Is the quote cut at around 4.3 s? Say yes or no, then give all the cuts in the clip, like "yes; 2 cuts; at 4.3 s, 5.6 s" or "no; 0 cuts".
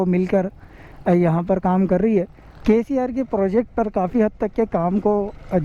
no; 1 cut; at 2.4 s